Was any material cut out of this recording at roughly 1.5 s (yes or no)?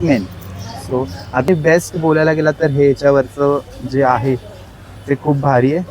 yes